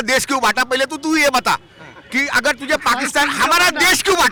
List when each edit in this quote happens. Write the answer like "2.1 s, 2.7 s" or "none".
none